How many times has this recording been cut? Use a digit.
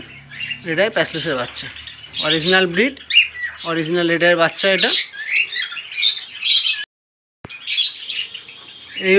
1